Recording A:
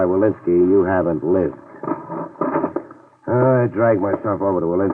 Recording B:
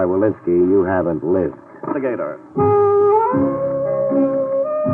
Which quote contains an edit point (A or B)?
A